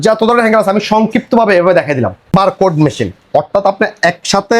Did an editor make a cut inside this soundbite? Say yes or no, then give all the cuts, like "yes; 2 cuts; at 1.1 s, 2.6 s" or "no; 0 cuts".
yes; 1 cut; at 2.3 s